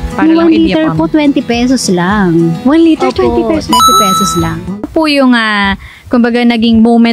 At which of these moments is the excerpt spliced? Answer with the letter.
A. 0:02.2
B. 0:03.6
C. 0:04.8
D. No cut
C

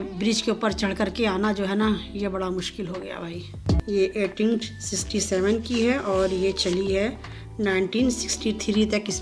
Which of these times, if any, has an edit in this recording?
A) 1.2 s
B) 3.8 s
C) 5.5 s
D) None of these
B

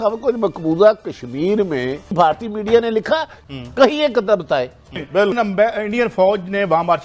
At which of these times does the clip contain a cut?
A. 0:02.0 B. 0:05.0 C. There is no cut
B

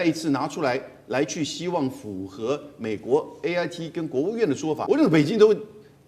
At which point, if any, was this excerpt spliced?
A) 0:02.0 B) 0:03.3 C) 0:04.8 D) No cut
C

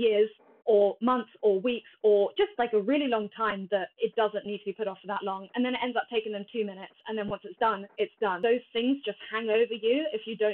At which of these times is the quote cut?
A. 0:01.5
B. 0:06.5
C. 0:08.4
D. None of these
C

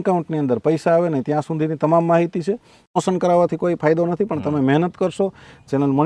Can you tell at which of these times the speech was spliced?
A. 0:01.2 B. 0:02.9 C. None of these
B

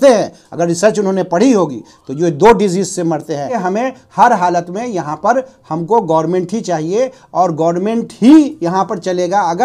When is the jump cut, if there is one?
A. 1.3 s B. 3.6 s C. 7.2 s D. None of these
B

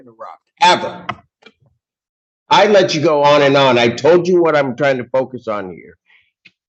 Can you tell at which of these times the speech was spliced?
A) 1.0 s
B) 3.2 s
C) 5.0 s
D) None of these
D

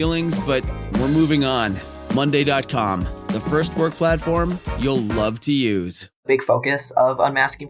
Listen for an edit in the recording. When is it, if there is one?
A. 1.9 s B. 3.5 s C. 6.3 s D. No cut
C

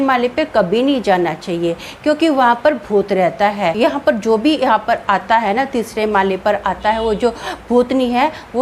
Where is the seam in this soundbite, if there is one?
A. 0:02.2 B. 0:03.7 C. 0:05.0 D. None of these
B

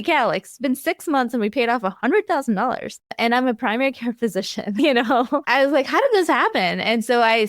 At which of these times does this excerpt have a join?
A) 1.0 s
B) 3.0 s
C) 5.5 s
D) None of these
C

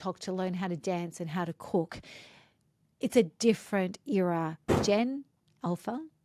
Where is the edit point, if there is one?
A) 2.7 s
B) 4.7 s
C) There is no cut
B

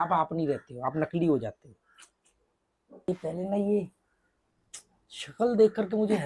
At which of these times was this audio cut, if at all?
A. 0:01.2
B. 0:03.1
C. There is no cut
B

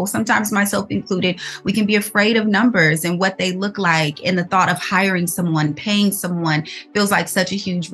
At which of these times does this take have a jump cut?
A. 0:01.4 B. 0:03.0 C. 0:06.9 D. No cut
D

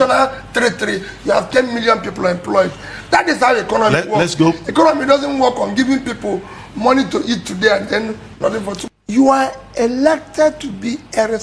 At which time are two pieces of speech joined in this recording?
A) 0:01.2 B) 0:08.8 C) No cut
B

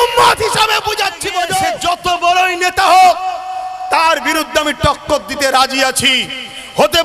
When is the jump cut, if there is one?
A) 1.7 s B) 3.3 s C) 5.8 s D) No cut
A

